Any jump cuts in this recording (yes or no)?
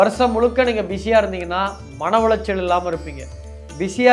no